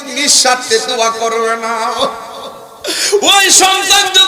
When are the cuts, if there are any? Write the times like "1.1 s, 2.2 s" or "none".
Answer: none